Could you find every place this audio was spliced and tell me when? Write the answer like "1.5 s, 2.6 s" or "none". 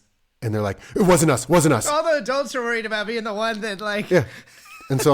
2.0 s